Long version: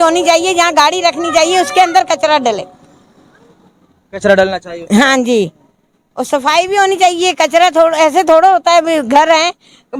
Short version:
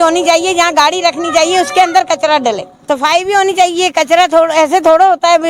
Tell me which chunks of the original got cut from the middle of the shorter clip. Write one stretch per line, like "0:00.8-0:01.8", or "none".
0:02.7-0:06.2